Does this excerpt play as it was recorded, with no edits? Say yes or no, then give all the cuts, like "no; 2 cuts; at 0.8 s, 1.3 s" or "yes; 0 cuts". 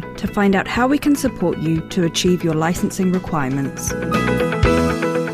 no; 1 cut; at 3.9 s